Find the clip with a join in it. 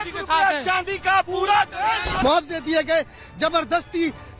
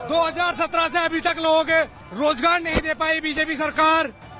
first; 1 cut; at 2.2 s

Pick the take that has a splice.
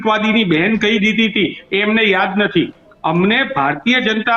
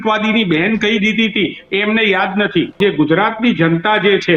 second; 1 cut; at 2.7 s

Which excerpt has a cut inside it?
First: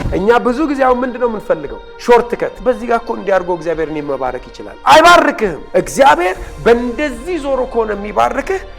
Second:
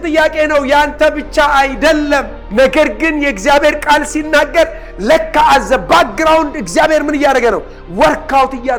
first; 2 cuts; at 2.6 s, 5.6 s

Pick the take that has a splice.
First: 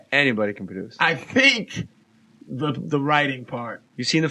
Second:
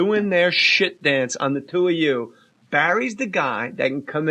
second; 1 cut; at 3.3 s

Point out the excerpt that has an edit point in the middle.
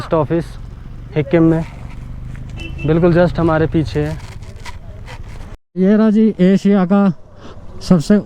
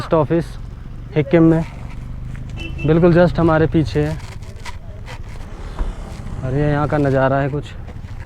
first; 1 cut; at 5.8 s

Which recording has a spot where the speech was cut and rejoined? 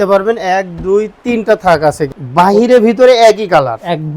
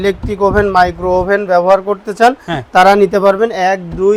first; 1 cut; at 2.0 s

